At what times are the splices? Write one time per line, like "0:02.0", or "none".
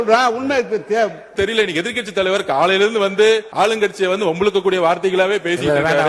0:01.3
0:03.5